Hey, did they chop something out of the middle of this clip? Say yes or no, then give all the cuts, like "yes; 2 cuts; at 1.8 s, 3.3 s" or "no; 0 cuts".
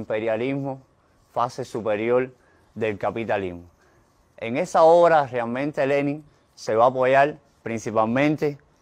no; 0 cuts